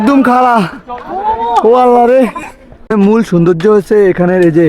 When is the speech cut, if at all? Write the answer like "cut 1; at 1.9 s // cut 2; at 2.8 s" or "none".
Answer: cut 1; at 2.8 s